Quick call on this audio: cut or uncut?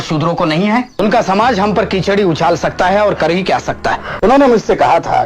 cut